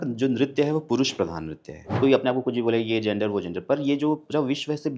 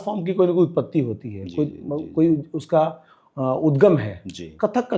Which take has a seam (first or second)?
first